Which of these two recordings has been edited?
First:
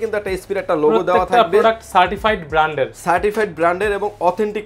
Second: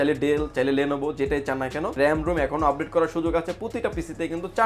second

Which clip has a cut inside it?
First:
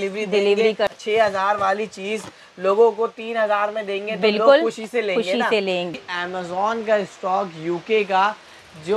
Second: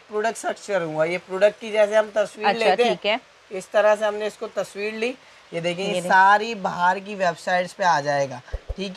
first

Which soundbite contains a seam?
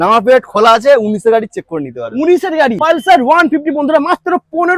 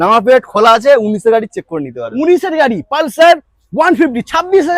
first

